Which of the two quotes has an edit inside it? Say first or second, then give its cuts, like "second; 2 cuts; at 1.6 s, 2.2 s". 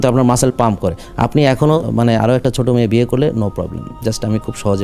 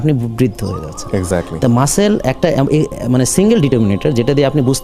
first; 1 cut; at 1.9 s